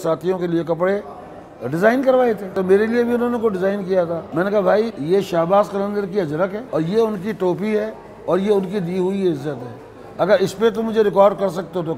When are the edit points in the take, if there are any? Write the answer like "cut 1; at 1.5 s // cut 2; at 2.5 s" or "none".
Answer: cut 1; at 2.5 s // cut 2; at 4.2 s // cut 3; at 5.0 s // cut 4; at 6.6 s

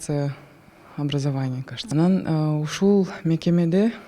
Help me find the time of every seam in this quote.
cut 1; at 1.7 s

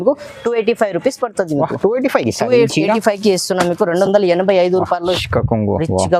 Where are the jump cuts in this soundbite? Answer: cut 1; at 5.2 s

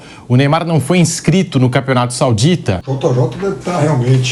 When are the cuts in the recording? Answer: cut 1; at 2.9 s

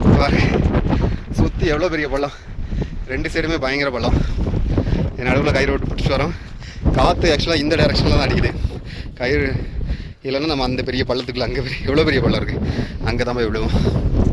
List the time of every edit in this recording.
none

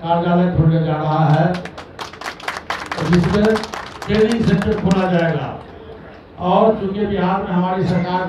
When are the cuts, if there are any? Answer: none

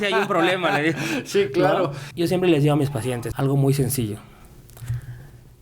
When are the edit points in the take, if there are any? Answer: cut 1; at 2.0 s // cut 2; at 3.3 s

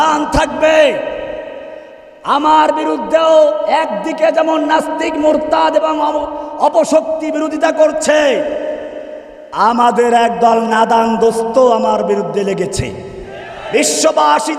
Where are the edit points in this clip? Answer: cut 1; at 13.6 s

